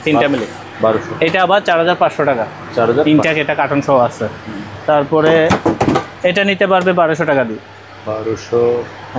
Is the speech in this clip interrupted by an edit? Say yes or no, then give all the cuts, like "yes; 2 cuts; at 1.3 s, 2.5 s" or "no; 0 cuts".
no; 0 cuts